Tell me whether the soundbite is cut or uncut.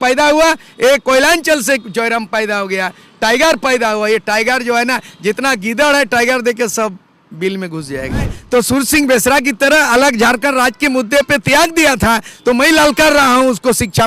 cut